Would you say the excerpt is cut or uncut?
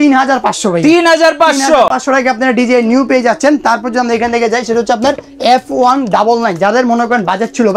uncut